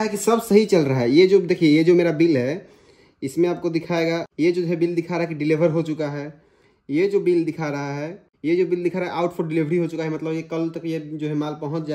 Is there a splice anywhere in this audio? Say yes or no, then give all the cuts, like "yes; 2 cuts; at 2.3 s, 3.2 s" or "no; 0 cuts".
no; 0 cuts